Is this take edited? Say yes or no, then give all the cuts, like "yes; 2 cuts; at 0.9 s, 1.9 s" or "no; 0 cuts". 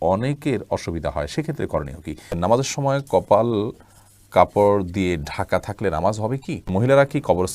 yes; 2 cuts; at 2.4 s, 6.7 s